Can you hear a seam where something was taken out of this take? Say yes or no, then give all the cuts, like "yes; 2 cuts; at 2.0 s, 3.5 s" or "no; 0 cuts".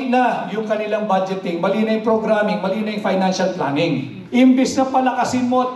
yes; 1 cut; at 4.1 s